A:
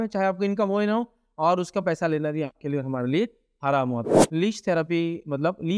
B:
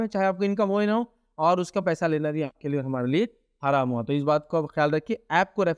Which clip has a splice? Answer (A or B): A